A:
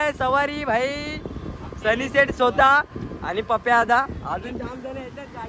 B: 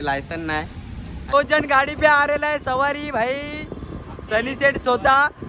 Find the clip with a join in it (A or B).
B